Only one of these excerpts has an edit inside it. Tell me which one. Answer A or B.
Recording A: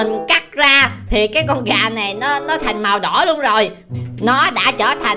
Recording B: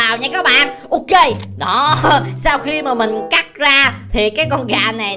A